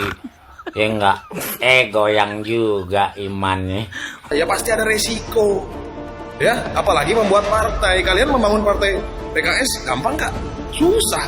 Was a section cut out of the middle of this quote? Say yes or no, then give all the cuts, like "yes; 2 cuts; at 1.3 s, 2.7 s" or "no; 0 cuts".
yes; 1 cut; at 4.3 s